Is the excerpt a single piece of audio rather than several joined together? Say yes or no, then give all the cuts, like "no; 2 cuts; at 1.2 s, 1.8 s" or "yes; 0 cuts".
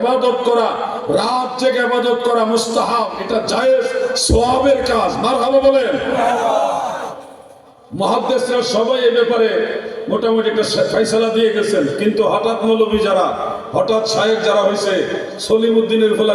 yes; 0 cuts